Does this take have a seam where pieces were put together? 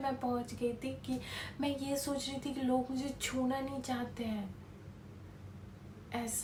no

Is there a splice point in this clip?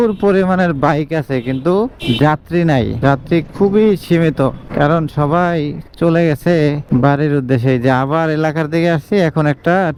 no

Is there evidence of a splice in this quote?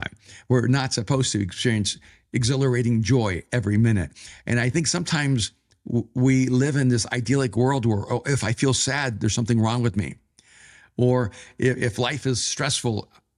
no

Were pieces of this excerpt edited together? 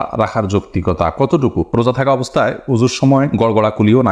yes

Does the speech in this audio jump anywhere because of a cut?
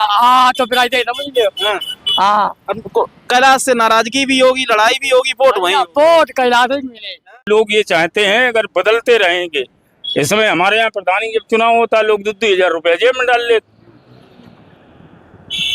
yes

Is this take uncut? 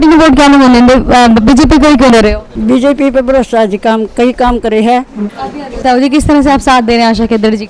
no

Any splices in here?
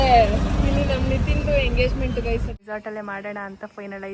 yes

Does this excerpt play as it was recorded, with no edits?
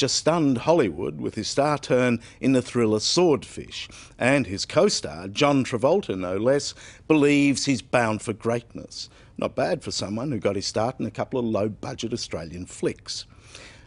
yes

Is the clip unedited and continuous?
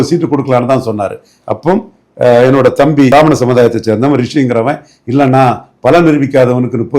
no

